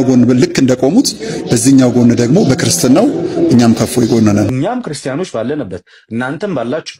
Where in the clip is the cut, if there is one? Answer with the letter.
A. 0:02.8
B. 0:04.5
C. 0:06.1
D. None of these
B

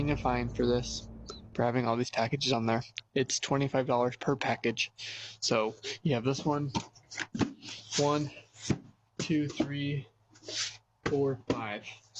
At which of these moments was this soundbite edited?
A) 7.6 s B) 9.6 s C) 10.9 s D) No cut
B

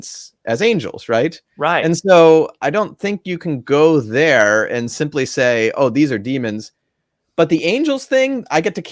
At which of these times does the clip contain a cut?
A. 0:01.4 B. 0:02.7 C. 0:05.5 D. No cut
D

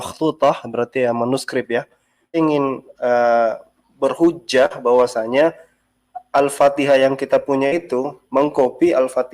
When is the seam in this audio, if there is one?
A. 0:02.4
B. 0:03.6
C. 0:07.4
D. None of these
A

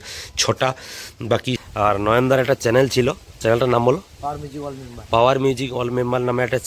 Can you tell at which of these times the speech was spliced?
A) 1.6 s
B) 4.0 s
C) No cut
A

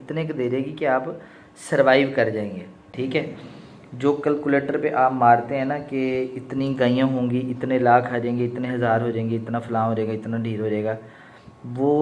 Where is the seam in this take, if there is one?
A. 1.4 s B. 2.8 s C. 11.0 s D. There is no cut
B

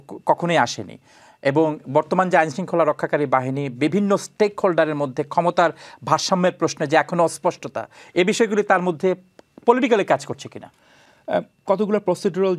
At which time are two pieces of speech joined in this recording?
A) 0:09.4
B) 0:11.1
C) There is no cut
C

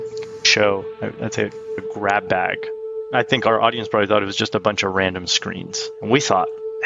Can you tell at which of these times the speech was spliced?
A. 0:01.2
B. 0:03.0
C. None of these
B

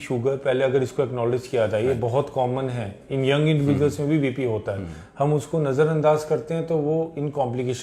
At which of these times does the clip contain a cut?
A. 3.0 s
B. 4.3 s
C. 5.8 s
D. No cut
D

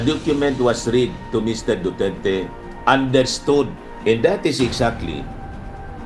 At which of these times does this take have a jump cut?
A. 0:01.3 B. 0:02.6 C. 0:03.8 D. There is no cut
C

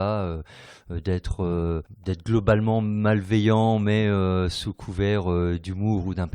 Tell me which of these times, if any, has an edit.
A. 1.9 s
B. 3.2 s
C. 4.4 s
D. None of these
A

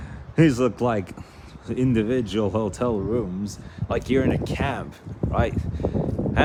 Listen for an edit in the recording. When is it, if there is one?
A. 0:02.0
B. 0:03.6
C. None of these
C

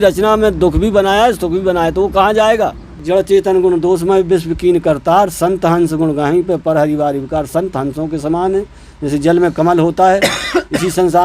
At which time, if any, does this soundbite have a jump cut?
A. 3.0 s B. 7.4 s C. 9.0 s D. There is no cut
A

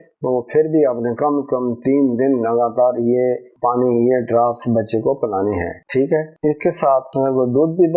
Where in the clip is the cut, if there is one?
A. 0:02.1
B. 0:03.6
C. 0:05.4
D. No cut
D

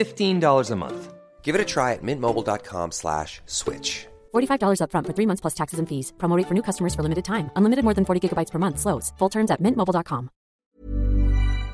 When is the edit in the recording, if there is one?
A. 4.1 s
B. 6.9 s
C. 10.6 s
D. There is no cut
C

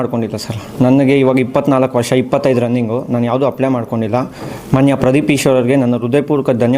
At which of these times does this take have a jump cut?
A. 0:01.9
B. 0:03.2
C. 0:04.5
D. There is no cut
C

